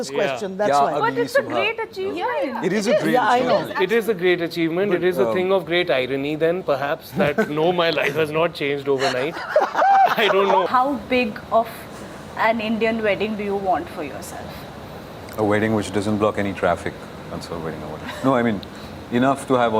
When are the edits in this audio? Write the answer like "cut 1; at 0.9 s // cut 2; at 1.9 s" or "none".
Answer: cut 1; at 10.7 s